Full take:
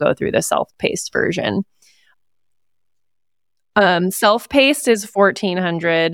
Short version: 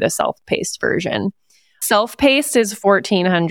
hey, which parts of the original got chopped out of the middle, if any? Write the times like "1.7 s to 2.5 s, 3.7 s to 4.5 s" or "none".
2.2 s to 4.2 s